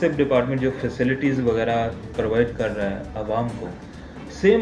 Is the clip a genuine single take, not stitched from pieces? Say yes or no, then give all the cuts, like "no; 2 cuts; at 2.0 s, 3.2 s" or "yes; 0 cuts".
yes; 0 cuts